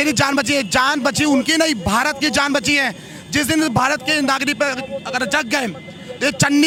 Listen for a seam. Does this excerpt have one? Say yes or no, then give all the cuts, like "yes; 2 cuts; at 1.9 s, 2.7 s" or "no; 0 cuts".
no; 0 cuts